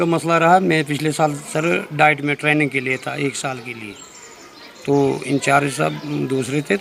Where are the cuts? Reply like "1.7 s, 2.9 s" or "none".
none